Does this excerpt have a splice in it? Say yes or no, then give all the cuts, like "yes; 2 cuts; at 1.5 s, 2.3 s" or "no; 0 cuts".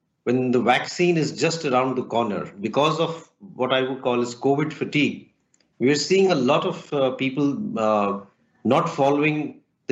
yes; 1 cut; at 2.6 s